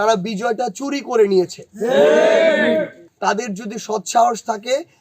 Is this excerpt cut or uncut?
cut